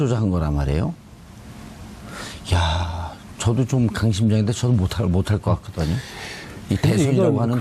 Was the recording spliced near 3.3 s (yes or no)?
no